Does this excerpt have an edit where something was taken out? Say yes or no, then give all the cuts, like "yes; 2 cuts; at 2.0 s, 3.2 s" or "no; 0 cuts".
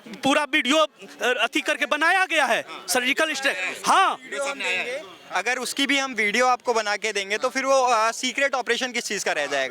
no; 0 cuts